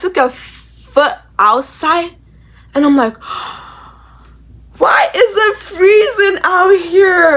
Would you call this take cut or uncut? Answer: uncut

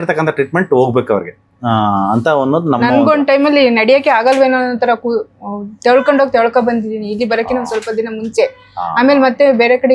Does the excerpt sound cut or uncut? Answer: uncut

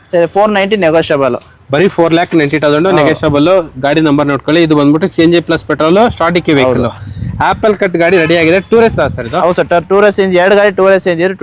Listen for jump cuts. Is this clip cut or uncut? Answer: uncut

